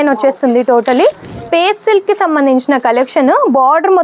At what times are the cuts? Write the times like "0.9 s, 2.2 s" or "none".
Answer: 1.3 s